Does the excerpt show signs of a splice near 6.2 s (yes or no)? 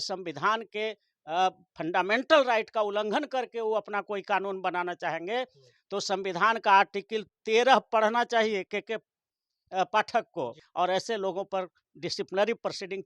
no